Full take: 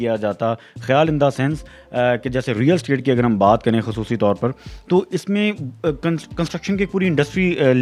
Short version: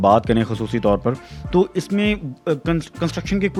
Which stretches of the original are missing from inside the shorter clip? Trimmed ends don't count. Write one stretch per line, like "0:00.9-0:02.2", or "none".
none